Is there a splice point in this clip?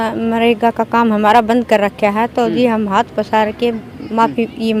no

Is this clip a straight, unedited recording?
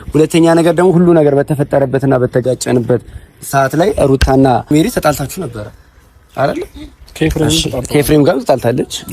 no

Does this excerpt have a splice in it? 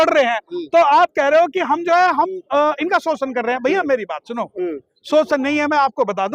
no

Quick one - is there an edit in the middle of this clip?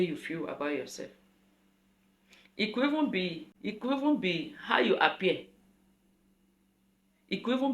yes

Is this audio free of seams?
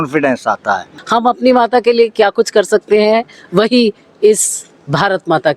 no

